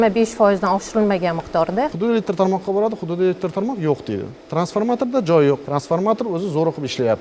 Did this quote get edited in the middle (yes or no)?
yes